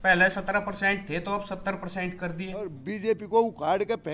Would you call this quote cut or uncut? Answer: cut